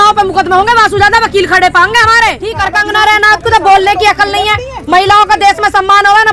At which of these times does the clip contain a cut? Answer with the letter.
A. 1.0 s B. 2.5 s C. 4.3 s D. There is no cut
B